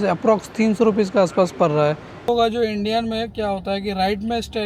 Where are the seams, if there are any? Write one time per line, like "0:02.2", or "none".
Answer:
0:02.3